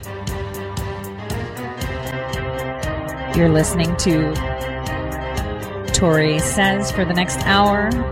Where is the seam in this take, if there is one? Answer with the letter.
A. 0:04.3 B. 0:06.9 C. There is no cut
C